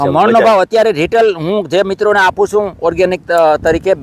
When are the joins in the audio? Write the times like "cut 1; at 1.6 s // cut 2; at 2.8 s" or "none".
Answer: none